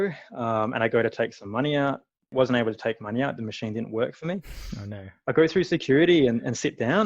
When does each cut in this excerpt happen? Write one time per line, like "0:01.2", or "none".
0:02.3